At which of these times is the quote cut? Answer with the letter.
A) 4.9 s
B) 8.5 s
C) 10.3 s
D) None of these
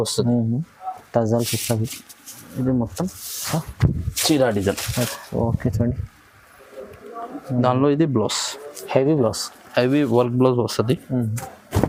D